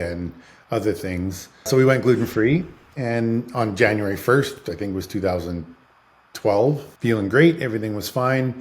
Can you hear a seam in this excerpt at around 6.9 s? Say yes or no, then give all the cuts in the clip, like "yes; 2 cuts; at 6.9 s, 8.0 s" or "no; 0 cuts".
yes; 2 cuts; at 1.7 s, 6.9 s